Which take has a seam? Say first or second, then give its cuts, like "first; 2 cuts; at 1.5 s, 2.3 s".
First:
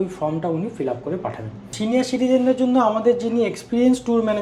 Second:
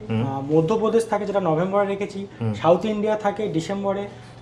first; 1 cut; at 1.7 s